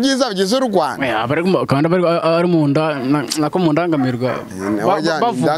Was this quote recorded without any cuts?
yes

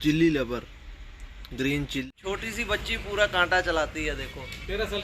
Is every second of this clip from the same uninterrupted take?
no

